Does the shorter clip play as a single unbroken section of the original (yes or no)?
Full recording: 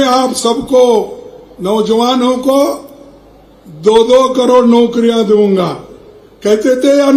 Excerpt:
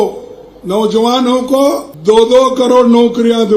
no